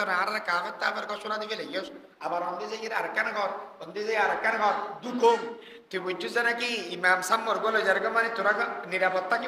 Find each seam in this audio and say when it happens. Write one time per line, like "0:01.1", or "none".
0:05.7